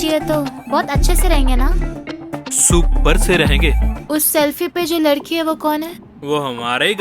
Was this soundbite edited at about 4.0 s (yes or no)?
yes